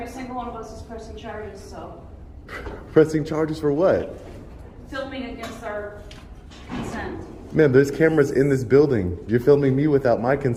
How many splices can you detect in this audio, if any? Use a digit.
0